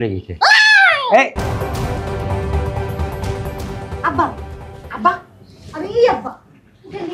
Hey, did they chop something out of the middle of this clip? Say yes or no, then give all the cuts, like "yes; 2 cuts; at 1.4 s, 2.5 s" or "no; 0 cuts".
yes; 1 cut; at 1.3 s